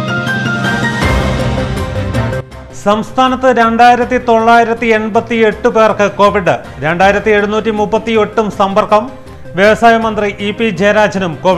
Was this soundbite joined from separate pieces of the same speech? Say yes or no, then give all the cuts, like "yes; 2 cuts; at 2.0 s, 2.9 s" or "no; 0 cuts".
no; 0 cuts